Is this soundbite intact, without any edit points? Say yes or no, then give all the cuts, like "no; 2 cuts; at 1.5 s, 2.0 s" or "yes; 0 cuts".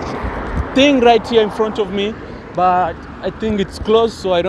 yes; 0 cuts